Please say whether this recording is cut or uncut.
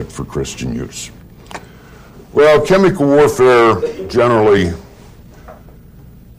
uncut